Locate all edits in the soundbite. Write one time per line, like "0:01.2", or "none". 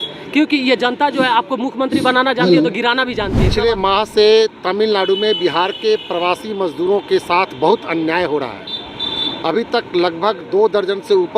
0:03.5